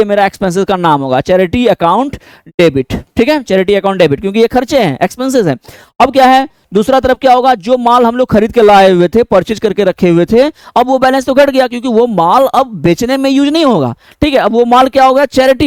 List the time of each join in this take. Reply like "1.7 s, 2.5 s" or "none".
none